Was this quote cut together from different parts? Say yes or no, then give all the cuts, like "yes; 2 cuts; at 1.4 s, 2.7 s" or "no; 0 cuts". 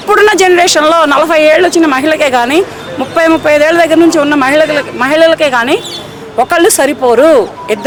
no; 0 cuts